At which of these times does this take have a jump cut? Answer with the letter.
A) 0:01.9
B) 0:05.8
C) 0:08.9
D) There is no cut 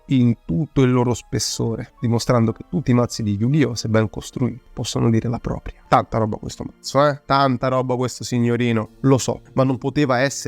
B